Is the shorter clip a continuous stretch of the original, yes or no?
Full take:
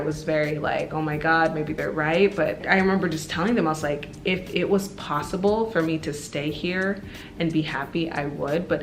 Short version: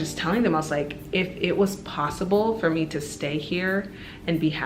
yes